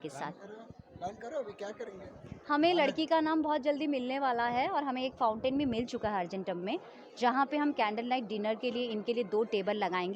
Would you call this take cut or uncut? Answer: uncut